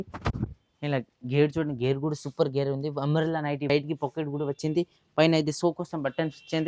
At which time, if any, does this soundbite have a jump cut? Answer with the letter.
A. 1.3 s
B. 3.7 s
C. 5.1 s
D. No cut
B